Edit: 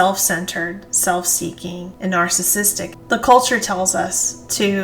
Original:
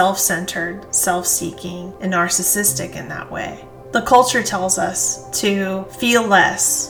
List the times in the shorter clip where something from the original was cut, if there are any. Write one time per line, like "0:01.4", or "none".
0:03.0

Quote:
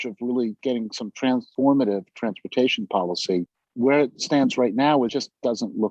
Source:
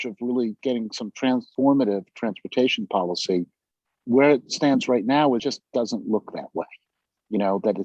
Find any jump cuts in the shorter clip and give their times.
0:03.6

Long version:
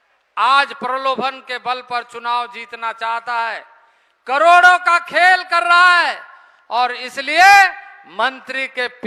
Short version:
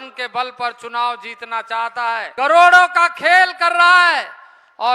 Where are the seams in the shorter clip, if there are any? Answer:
0:02.3

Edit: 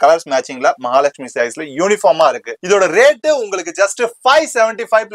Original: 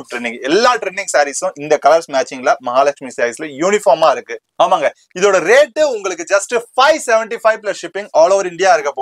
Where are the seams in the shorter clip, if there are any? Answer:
0:02.5

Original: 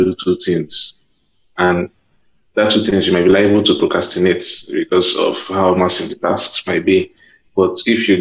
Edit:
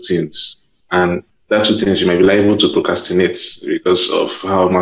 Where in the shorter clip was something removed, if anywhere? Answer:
0:01.0

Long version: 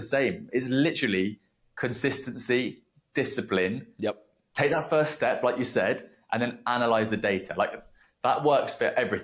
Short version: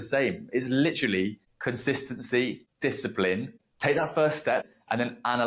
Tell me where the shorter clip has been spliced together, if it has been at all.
0:01.5
0:02.7
0:03.5
0:04.6

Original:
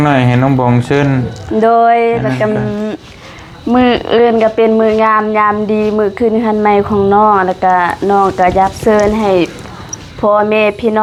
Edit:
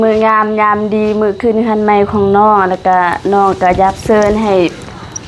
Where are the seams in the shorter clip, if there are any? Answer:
none

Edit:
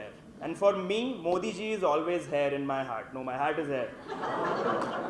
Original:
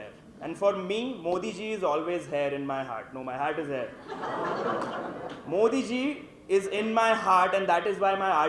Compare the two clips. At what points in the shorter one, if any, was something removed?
none

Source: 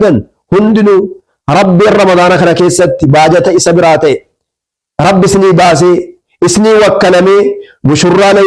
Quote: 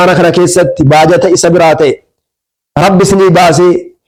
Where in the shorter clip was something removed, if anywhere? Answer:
none

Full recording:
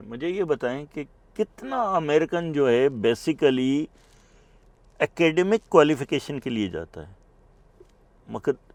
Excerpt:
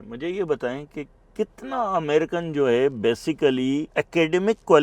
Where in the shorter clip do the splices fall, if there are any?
0:03.9

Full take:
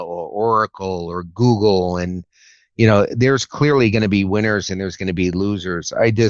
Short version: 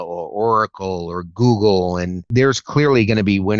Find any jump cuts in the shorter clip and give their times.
0:02.3

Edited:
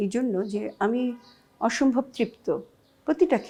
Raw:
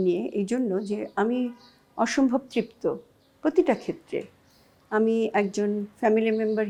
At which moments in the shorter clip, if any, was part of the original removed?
none

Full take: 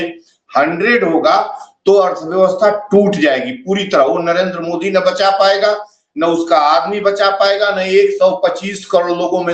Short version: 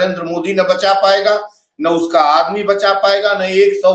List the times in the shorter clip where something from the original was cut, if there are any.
none

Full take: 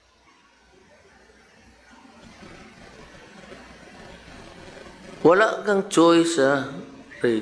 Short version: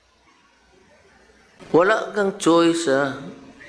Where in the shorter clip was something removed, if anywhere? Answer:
0:01.6

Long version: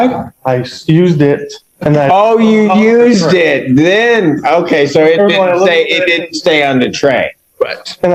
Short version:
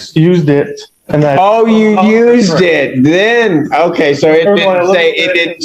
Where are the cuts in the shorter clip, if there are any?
none

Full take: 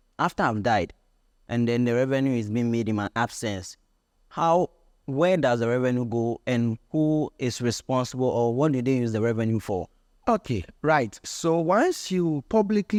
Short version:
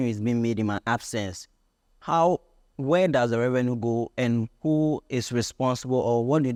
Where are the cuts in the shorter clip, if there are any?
none

